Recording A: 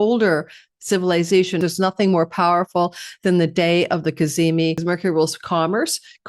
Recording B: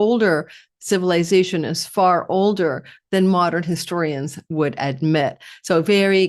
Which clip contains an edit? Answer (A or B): A